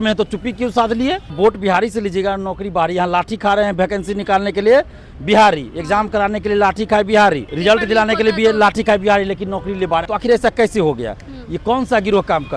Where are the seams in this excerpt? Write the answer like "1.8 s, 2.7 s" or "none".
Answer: 1.3 s, 7.5 s, 10.1 s